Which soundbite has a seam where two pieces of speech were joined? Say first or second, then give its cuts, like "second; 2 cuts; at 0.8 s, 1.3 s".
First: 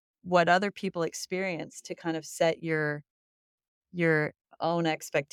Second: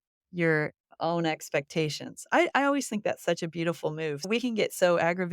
second; 1 cut; at 4.3 s